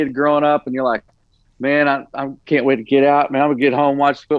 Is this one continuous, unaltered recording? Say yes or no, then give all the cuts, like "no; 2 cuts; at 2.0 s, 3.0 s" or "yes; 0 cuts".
yes; 0 cuts